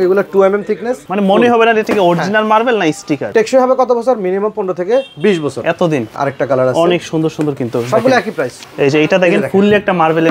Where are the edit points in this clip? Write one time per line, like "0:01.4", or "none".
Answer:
0:01.1
0:03.3
0:06.1
0:08.6